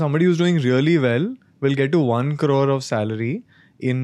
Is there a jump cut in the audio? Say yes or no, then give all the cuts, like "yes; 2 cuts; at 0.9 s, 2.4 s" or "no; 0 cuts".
no; 0 cuts